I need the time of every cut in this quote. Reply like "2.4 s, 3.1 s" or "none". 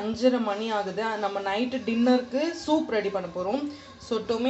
none